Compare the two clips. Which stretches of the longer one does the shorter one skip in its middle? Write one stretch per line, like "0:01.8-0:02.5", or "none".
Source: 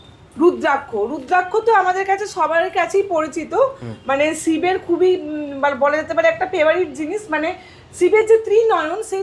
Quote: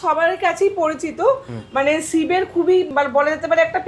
0:05.2-0:05.6